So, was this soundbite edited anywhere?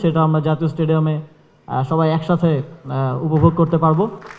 no; 0 cuts

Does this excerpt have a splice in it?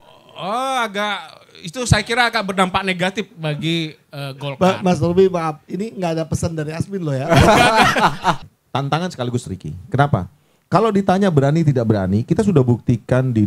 yes; 1 cut; at 8.4 s

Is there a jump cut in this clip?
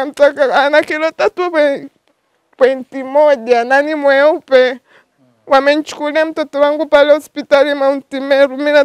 no; 0 cuts

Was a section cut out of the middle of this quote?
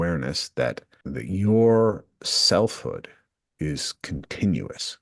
yes; 1 cut; at 0.9 s

